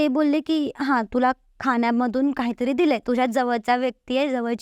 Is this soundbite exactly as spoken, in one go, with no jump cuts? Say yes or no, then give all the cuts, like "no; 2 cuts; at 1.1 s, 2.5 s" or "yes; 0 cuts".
yes; 0 cuts